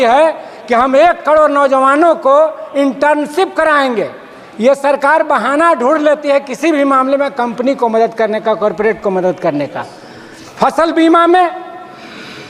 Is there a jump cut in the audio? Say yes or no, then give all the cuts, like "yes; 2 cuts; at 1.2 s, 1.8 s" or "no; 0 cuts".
no; 0 cuts